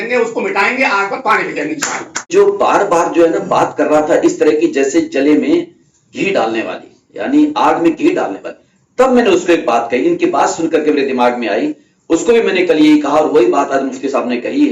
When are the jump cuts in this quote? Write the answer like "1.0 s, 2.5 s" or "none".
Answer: 2.3 s